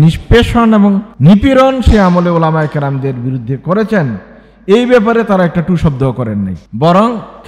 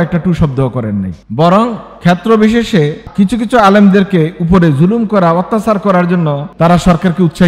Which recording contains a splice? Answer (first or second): second